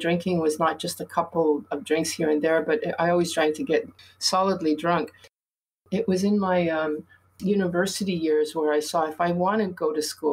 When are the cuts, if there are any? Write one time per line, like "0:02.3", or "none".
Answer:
none